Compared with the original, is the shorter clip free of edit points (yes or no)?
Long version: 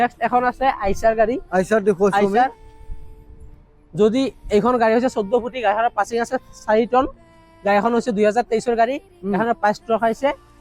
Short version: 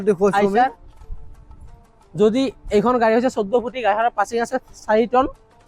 yes